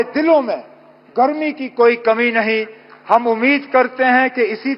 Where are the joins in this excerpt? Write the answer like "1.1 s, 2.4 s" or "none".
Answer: none